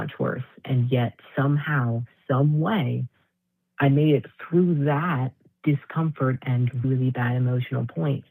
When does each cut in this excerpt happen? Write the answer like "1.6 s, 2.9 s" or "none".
none